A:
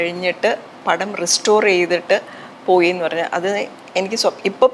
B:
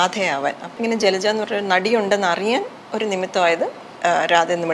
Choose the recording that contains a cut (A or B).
B